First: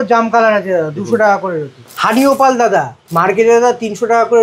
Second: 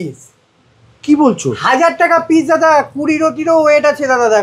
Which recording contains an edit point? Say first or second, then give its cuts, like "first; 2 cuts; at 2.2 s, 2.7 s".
first; 2 cuts; at 1.8 s, 3.0 s